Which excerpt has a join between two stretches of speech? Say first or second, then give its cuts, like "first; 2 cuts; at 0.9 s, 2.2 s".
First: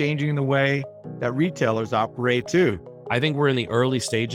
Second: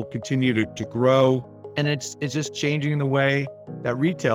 first; 1 cut; at 2.9 s